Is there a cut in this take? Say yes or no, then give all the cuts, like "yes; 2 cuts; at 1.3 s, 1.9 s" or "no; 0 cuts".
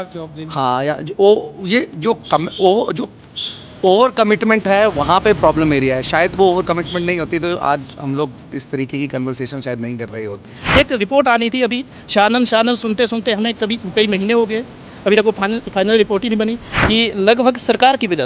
yes; 2 cuts; at 10.7 s, 16.7 s